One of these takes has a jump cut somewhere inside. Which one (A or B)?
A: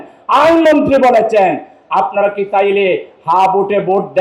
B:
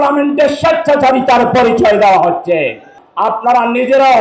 B